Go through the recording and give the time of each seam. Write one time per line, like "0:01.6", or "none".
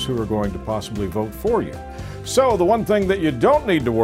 none